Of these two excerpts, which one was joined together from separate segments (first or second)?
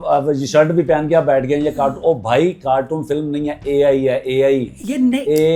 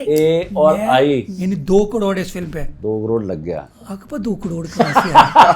second